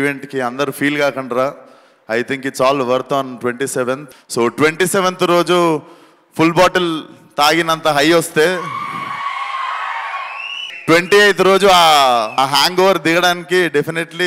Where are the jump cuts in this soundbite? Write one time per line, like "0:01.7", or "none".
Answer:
0:04.0
0:10.6
0:12.3